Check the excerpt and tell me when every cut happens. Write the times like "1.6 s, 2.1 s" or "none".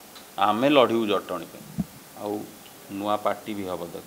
2.0 s